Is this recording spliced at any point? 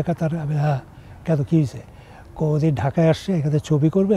no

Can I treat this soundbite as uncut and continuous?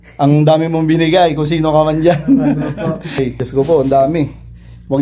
no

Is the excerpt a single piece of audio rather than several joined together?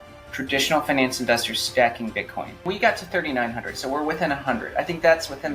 no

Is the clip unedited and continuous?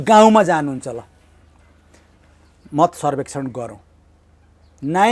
yes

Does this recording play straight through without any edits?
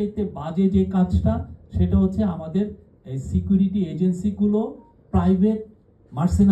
yes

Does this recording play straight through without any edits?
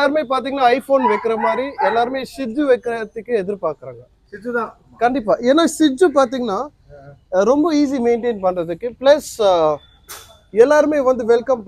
yes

